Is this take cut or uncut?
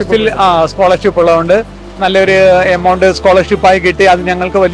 uncut